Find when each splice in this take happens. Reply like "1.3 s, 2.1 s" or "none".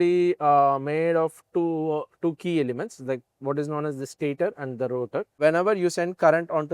5.4 s